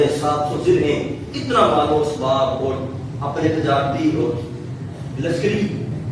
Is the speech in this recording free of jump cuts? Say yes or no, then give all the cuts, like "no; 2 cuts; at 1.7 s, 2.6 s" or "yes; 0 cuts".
yes; 0 cuts